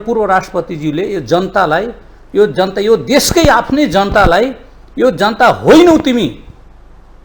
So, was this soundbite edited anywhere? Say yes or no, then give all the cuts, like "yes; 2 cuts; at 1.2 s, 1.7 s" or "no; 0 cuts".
no; 0 cuts